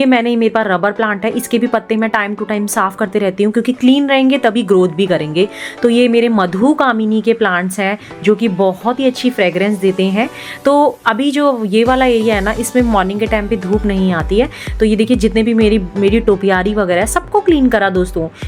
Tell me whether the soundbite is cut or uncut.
uncut